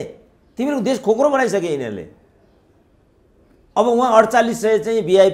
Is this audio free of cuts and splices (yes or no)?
yes